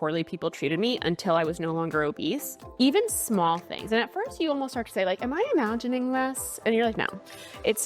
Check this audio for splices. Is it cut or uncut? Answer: cut